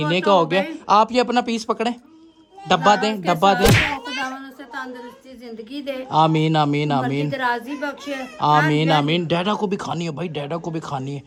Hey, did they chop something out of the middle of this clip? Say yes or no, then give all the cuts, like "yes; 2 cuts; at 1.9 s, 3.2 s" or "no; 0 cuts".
no; 0 cuts